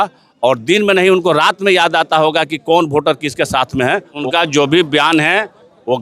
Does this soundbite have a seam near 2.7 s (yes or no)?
no